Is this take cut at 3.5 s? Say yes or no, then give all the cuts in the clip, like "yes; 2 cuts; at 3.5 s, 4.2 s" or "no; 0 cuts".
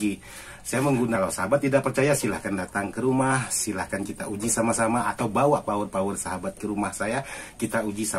no; 1 cut; at 1.2 s